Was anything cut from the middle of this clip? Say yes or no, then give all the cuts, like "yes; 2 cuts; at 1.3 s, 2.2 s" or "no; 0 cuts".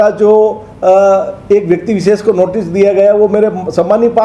no; 0 cuts